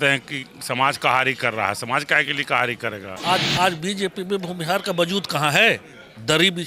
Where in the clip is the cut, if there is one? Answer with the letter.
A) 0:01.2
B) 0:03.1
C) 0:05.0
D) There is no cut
B